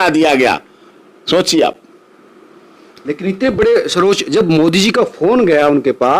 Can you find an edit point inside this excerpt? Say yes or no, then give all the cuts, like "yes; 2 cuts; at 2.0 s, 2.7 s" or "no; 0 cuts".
no; 0 cuts